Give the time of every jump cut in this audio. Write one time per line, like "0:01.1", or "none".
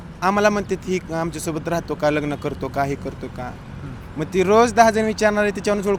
none